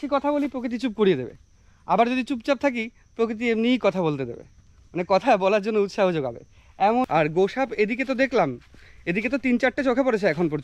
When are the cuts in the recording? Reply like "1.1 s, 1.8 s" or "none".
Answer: 7.1 s

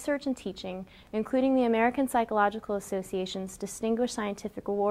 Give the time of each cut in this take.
none

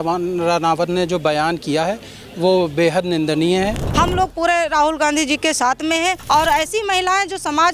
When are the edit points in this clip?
3.8 s, 6.2 s

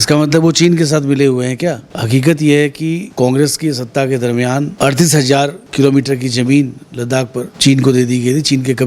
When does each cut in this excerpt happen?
1.9 s, 3.1 s, 4.7 s, 5.6 s, 7.5 s

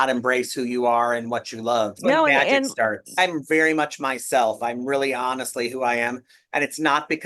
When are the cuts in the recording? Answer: 2.0 s, 3.2 s

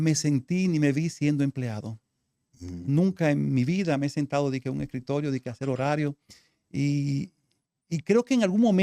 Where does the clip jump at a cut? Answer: none

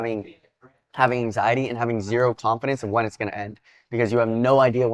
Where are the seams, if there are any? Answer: none

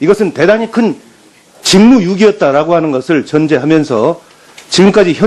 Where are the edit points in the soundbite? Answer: 1.0 s

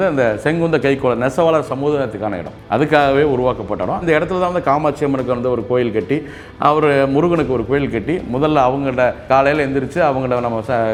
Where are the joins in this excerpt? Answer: none

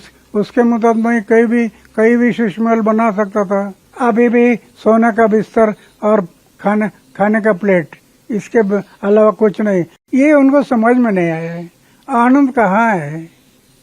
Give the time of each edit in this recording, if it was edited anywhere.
3.8 s, 10.0 s

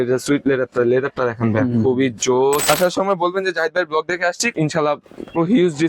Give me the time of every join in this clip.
2.7 s, 4.5 s

